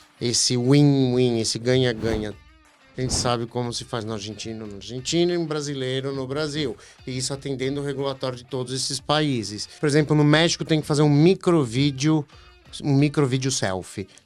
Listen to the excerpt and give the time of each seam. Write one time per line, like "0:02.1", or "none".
0:02.4
0:09.7